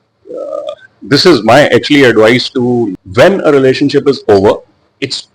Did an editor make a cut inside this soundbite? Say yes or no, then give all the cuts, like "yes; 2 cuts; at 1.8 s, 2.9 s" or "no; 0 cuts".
yes; 1 cut; at 2.9 s